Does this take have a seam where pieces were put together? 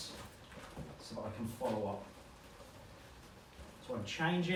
no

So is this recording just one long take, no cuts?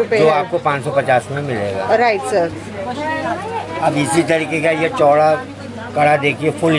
yes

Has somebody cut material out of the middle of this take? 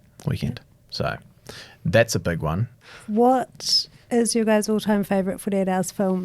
yes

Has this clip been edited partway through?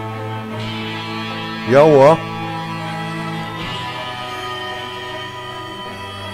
no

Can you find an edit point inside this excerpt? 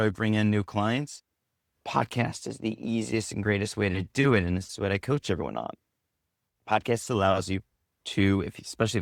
no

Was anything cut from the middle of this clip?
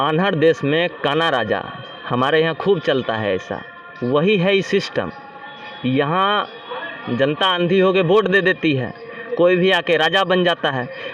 no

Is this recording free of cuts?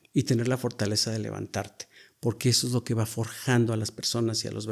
yes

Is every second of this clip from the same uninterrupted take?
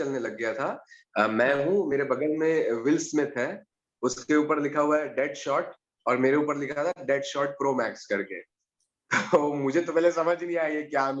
yes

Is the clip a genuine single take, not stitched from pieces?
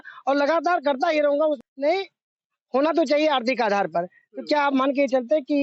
no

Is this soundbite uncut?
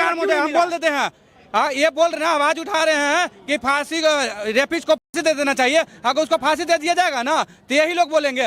yes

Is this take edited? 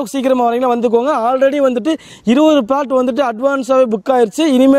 no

